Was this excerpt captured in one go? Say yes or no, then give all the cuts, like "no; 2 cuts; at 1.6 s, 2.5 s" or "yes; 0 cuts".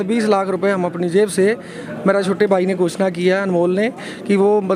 yes; 0 cuts